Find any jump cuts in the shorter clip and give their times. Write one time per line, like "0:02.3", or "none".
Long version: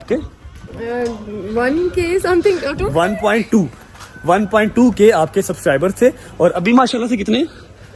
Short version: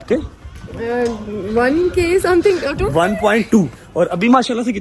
0:03.8